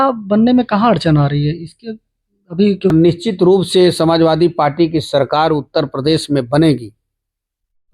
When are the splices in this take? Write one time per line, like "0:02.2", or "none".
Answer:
0:02.9